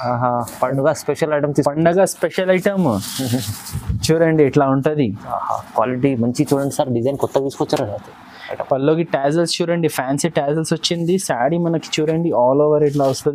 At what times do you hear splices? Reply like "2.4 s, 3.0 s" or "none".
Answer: none